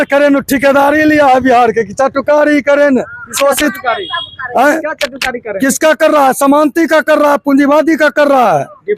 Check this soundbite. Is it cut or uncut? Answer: uncut